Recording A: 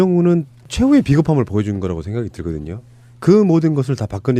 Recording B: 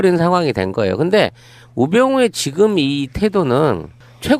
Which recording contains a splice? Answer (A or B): B